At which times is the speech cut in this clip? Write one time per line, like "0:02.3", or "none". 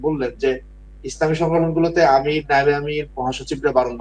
none